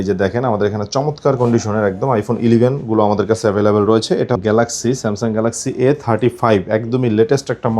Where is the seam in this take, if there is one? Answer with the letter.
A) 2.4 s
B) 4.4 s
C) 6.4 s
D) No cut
B